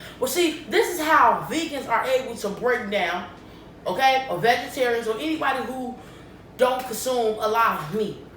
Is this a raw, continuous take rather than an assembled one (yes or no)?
yes